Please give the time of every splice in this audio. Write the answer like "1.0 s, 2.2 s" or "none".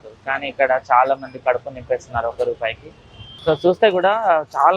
3.3 s